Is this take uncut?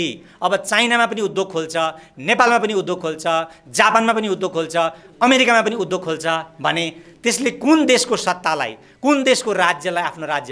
yes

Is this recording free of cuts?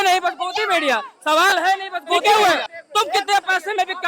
no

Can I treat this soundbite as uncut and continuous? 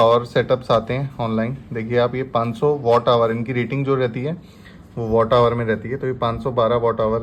yes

